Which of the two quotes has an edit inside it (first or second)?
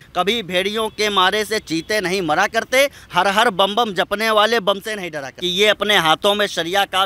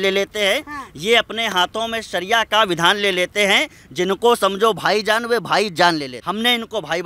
second